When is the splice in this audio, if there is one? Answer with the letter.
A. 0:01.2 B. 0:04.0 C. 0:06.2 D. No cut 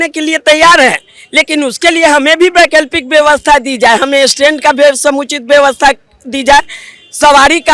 D